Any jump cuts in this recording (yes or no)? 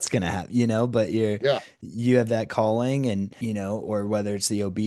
yes